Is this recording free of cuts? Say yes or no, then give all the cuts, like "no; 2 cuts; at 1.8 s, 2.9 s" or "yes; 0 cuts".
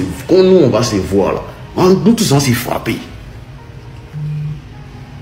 yes; 0 cuts